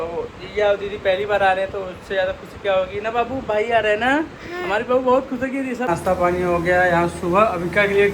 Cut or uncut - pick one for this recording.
cut